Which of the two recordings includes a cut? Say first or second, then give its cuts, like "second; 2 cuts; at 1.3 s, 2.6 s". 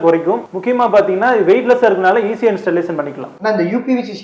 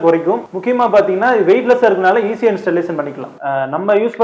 second; 1 cut; at 3.3 s